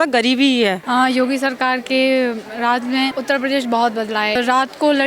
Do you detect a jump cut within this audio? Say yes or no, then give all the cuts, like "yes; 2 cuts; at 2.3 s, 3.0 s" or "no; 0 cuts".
yes; 3 cuts; at 0.8 s, 3.2 s, 4.4 s